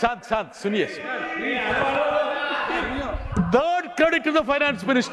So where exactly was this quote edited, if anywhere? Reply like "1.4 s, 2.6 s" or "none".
none